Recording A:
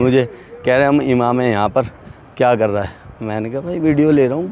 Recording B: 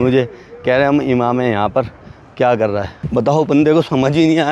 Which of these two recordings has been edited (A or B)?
B